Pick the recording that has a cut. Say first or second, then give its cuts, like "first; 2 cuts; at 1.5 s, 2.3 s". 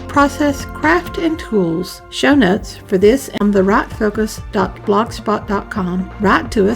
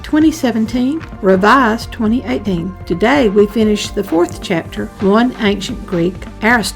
first; 1 cut; at 4.4 s